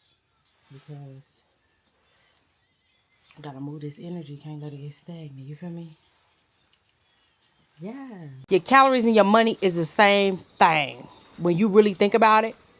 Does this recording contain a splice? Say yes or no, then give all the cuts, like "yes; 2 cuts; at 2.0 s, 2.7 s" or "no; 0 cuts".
yes; 1 cut; at 8.4 s